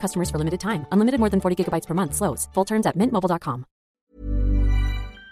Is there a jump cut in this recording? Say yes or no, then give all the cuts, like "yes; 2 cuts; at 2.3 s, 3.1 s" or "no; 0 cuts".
yes; 1 cut; at 3.9 s